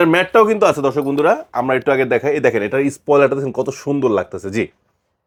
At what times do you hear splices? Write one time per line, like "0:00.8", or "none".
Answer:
none